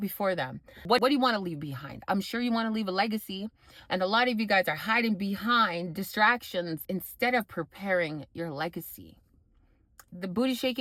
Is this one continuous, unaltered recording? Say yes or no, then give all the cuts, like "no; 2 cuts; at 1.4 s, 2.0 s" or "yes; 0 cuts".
yes; 0 cuts